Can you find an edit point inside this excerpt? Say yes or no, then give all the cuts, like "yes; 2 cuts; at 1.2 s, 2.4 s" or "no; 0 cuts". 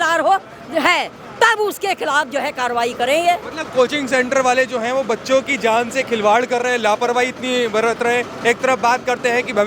no; 0 cuts